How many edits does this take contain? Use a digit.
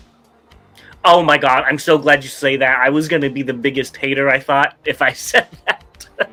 0